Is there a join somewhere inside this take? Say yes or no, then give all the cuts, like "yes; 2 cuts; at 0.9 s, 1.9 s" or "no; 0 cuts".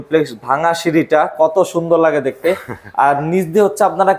no; 0 cuts